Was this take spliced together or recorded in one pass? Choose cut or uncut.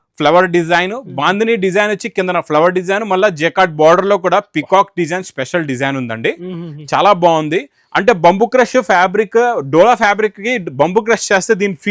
uncut